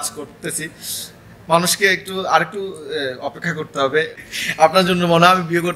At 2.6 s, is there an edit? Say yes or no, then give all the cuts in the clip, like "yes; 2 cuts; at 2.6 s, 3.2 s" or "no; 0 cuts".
no; 1 cut; at 4.1 s